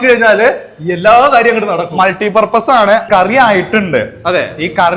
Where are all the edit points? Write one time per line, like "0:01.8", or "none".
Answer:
0:03.0